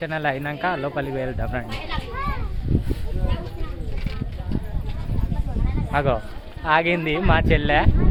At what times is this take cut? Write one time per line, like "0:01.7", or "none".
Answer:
none

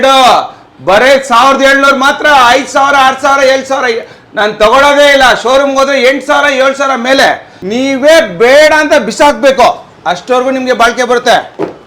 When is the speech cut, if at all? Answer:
0:07.5

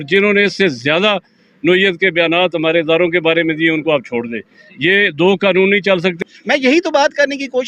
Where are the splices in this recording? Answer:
0:06.1

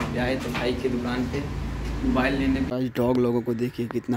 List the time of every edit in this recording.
0:02.7

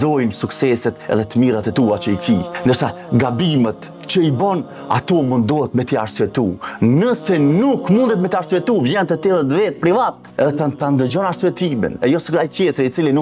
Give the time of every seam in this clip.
0:02.7

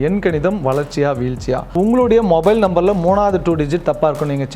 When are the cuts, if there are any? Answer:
0:01.7

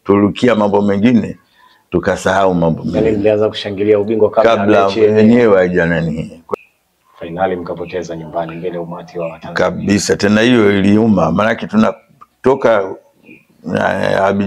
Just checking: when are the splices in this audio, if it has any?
0:06.5

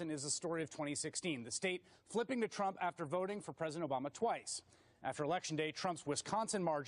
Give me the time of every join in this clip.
0:04.5

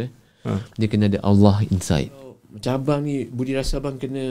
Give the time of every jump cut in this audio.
0:02.5

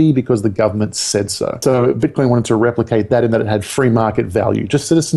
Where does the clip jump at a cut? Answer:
0:01.6

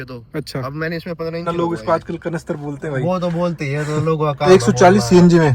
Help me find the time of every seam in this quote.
0:01.4
0:04.5

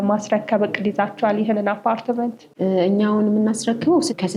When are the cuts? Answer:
none

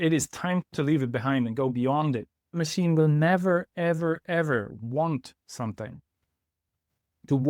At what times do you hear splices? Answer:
0:02.6

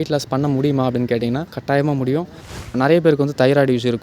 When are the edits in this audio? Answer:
0:01.4
0:02.7

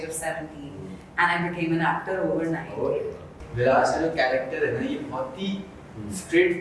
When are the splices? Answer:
0:03.3

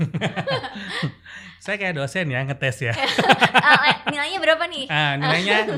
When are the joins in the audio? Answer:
none

